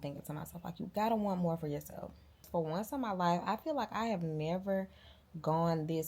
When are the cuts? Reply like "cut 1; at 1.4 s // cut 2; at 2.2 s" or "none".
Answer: cut 1; at 2.4 s